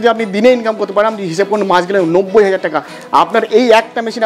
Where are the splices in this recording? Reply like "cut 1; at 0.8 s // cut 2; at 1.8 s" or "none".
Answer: none